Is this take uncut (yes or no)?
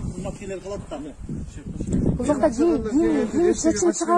yes